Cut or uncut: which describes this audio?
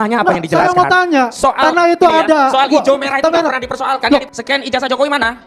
cut